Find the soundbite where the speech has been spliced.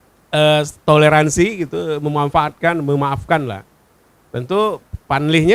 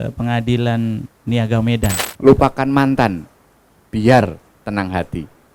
second; 1 cut; at 2.1 s

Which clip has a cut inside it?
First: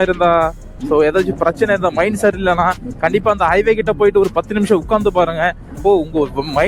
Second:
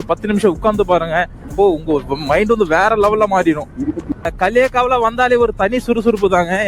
second; 1 cut; at 4.0 s

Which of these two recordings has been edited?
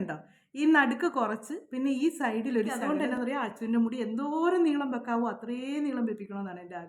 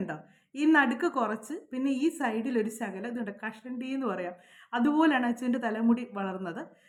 first; 1 cut; at 2.8 s

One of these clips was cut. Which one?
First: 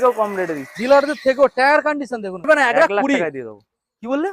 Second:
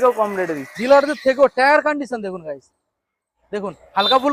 first; 1 cut; at 2.5 s

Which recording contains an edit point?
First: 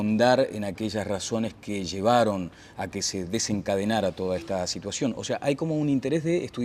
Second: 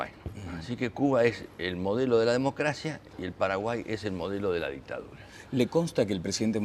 second; 1 cut; at 3.6 s

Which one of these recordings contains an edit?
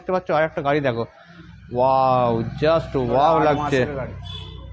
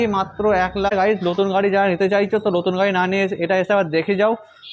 second; 1 cut; at 0.9 s

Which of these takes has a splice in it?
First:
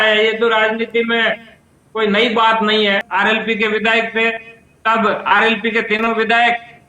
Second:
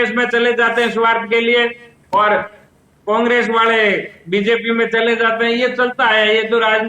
first; 1 cut; at 3.1 s

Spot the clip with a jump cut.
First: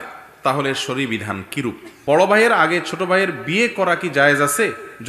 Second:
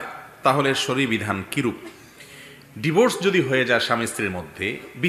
first; 1 cut; at 1.9 s

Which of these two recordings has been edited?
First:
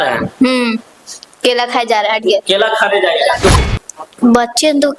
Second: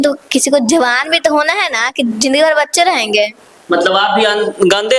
first; 1 cut; at 3.5 s

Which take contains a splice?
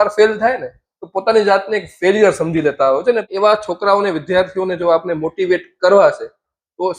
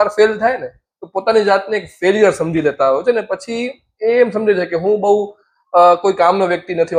first; 1 cut; at 3.3 s

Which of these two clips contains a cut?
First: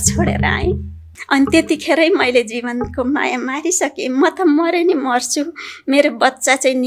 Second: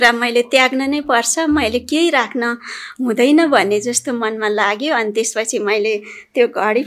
first; 1 cut; at 1.0 s

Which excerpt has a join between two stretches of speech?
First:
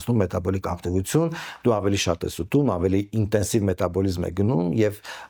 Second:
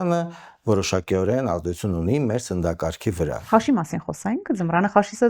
second; 1 cut; at 3.4 s

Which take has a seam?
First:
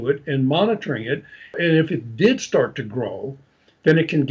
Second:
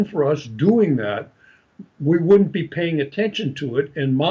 first; 1 cut; at 1.6 s

